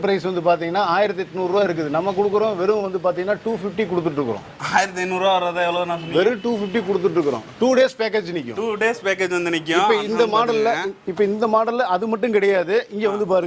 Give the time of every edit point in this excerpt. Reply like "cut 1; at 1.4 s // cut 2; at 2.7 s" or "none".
none